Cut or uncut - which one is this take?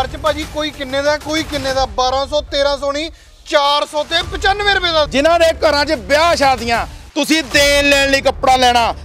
cut